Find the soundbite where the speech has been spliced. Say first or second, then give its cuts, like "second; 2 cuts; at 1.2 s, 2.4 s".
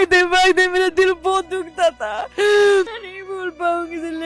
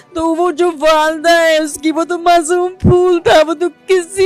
first; 1 cut; at 3.1 s